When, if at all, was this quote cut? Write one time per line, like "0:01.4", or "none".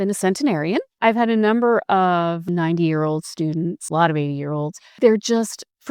0:00.9
0:02.5
0:03.8
0:05.0